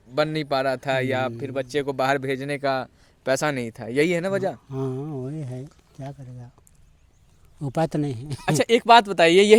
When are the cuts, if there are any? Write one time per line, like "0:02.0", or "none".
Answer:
none

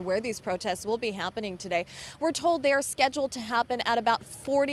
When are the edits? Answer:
none

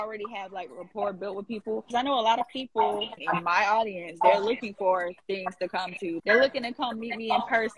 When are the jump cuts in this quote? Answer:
0:01.9
0:03.1
0:06.2

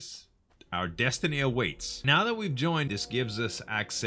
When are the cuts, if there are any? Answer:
0:02.0
0:02.9

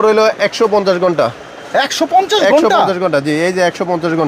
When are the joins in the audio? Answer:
none

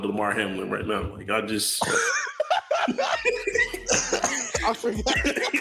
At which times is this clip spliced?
none

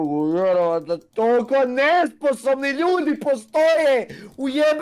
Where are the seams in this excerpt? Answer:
none

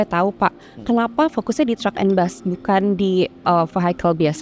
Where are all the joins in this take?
none

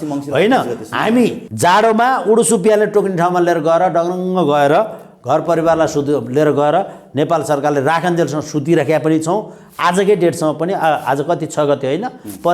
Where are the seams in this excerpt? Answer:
0:01.5

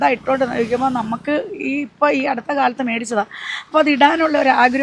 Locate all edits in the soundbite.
none

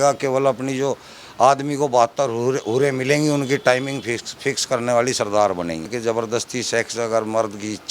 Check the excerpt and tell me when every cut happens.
0:05.9

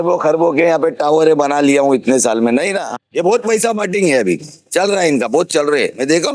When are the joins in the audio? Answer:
0:02.9

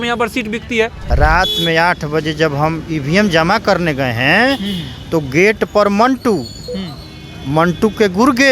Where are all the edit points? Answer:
0:01.0

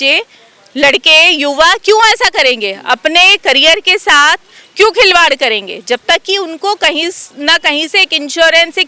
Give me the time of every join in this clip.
none

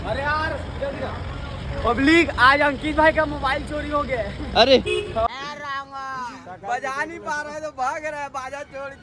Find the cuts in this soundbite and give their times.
0:05.3

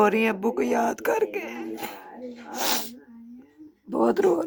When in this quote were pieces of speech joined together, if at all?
none

